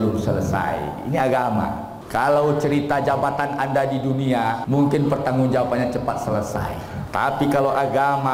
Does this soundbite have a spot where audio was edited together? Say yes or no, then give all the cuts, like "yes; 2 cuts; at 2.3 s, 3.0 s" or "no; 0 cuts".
yes; 3 cuts; at 1.9 s, 4.6 s, 6.9 s